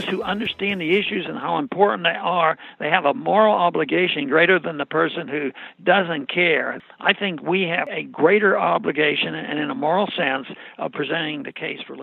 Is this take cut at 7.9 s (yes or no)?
yes